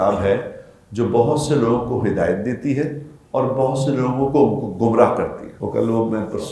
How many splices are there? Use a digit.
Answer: 1